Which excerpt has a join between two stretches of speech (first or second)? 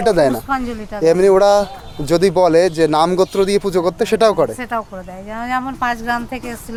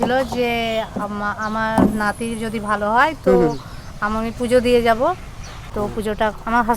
second